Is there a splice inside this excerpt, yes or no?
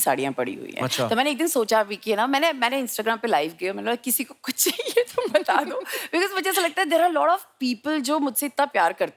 no